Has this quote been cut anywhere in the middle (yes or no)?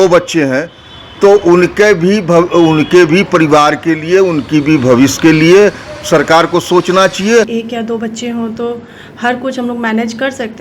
yes